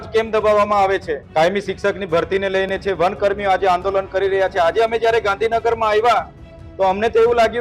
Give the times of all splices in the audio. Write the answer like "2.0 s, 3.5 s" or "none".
1.2 s